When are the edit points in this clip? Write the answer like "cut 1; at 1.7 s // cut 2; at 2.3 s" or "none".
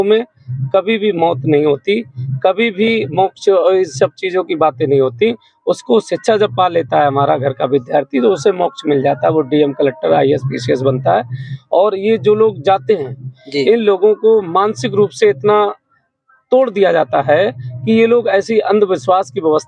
none